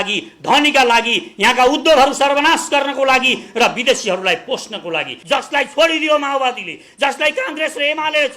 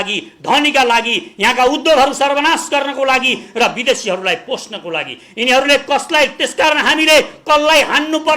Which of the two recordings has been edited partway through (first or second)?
first